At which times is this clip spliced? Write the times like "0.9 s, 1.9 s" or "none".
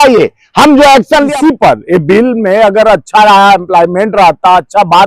1.3 s